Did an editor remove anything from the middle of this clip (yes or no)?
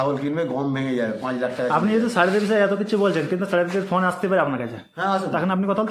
no